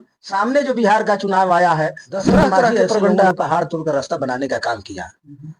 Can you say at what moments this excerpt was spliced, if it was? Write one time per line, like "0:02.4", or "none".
0:03.3